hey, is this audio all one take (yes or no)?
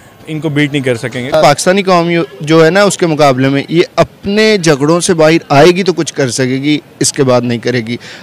no